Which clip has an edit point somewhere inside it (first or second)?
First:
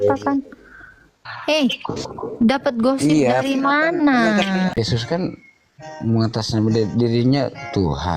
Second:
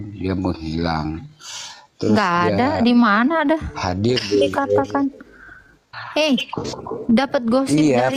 first